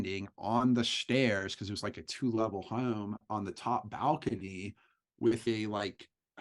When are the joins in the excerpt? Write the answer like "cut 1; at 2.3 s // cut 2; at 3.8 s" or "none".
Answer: none